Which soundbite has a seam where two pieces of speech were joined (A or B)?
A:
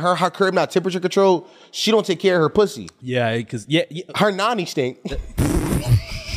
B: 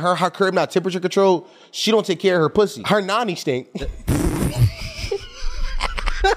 B